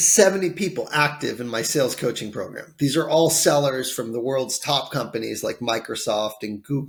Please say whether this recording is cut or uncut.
uncut